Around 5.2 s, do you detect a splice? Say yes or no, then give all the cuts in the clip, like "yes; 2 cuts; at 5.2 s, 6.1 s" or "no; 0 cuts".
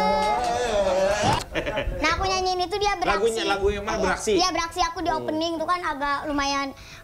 no; 1 cut; at 1.4 s